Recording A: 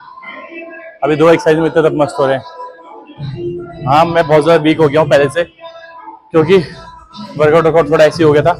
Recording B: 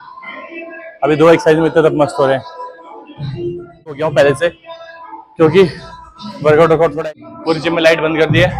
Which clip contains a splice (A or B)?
B